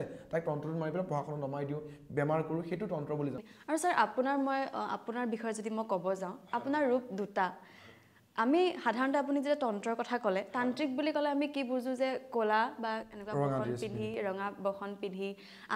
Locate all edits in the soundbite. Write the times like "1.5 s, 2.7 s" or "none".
3.5 s

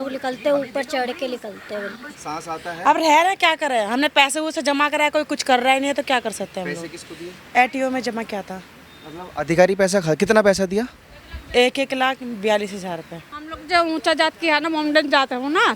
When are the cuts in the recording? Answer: 2.1 s, 7.3 s, 13.5 s

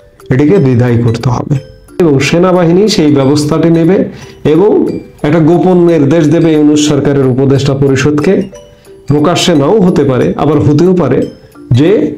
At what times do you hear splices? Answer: 2.0 s

